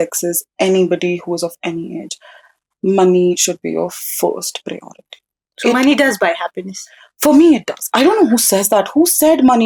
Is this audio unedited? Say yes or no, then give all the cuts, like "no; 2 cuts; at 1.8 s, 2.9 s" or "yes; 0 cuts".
yes; 0 cuts